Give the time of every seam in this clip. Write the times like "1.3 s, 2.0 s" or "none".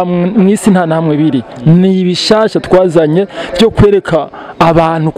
none